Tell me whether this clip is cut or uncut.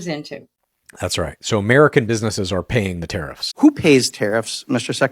cut